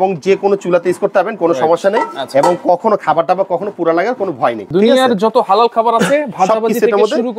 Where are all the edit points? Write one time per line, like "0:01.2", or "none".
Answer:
0:04.7